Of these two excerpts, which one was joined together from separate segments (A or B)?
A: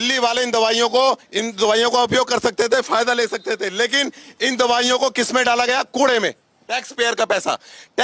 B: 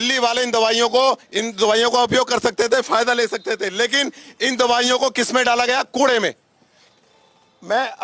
A